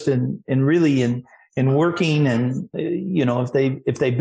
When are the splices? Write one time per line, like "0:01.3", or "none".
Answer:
0:02.7